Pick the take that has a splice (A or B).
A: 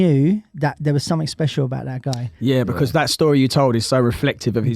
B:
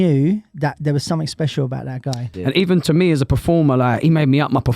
B